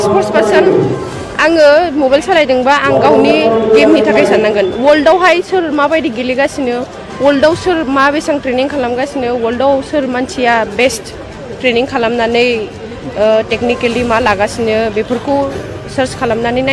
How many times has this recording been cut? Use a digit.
0